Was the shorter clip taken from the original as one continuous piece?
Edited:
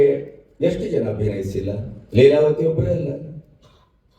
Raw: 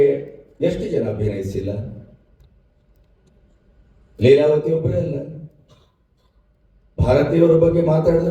no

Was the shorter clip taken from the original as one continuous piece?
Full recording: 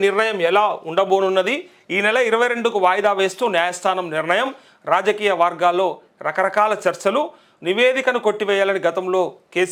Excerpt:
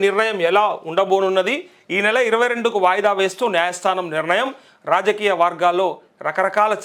yes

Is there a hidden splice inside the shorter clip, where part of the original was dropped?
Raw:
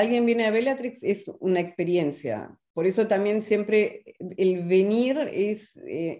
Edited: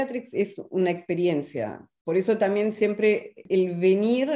yes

